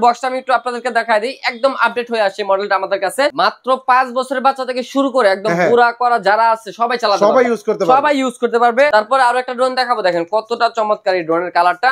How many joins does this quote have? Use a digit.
2